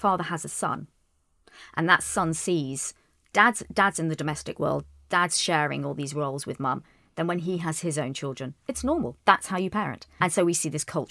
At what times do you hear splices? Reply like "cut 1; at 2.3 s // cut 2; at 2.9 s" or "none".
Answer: cut 1; at 10.2 s